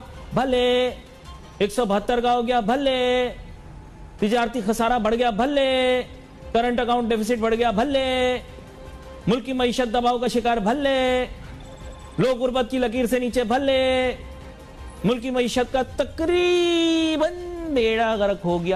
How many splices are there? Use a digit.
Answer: 0